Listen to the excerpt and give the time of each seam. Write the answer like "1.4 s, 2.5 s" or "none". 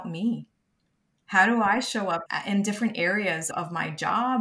2.3 s, 3.4 s

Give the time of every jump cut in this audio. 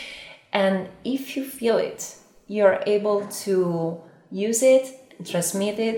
none

